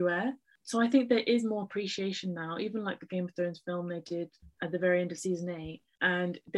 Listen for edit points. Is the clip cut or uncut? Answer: cut